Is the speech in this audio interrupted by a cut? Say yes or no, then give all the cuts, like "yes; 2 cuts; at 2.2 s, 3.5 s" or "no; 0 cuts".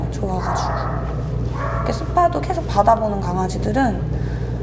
no; 0 cuts